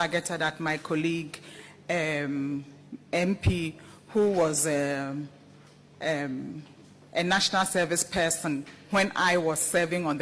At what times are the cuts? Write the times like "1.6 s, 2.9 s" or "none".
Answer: none